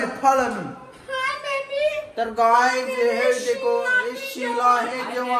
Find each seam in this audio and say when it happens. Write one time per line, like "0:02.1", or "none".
none